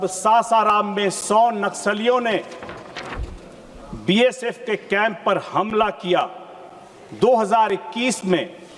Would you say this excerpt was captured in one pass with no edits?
yes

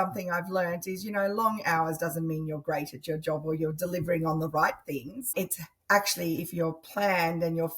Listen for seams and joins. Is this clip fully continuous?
no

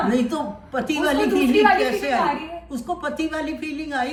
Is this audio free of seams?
yes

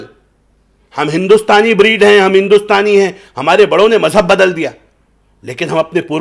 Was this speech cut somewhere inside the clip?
no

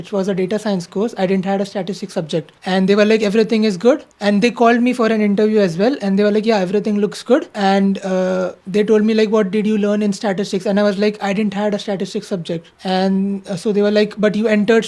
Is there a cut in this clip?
no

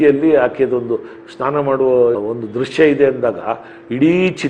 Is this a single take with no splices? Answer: yes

